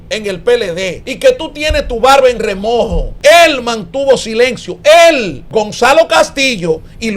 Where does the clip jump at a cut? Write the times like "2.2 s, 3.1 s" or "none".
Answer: 1.1 s, 3.0 s, 5.4 s